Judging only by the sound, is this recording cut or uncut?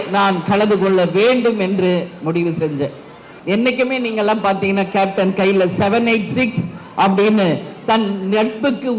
cut